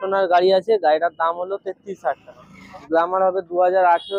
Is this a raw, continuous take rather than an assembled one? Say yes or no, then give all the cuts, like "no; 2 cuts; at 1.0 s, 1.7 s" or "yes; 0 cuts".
no; 1 cut; at 2.7 s